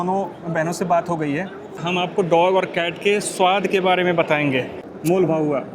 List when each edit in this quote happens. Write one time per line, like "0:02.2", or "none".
0:02.1
0:04.8